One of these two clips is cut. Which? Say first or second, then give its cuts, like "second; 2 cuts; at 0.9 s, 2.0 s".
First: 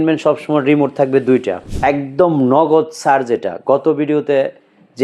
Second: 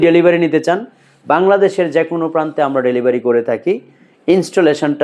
first; 1 cut; at 1.6 s